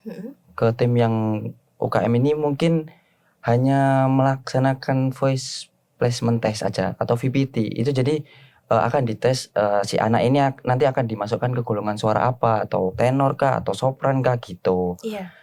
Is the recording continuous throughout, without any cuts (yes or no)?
yes